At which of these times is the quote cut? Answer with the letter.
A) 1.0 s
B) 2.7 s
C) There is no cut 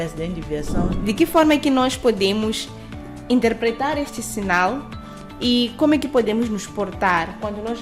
A